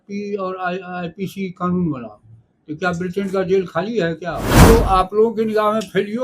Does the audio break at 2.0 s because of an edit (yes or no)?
no